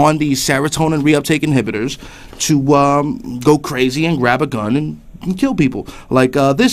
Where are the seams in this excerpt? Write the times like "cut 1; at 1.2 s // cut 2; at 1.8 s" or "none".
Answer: cut 1; at 3.7 s